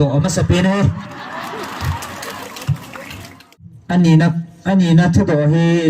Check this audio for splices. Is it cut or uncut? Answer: cut